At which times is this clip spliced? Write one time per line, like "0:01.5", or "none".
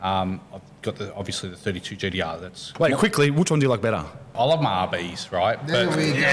0:02.7
0:04.4